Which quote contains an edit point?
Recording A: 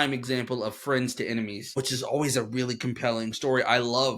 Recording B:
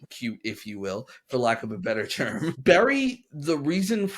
A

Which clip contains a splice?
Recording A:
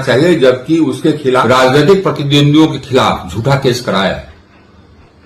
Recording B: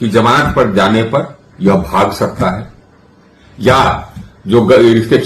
A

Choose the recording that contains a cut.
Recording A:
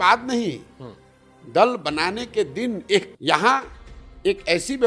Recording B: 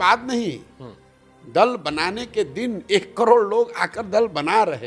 A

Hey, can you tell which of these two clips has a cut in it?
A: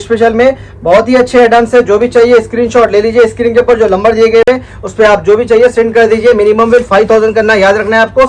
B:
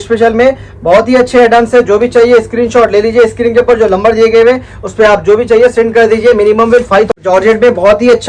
B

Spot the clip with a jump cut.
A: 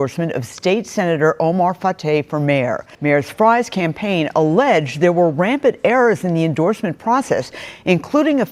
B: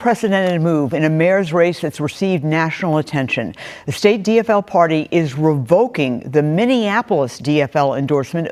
A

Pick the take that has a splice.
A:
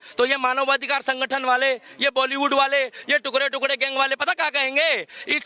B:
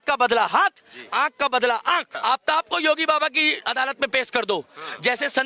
B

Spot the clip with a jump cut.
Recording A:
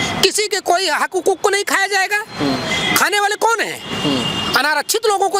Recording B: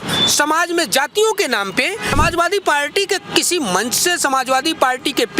B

